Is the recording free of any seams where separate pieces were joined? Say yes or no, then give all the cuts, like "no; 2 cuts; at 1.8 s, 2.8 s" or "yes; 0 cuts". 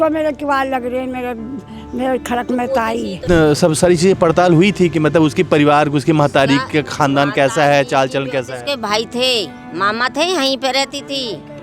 no; 1 cut; at 3.2 s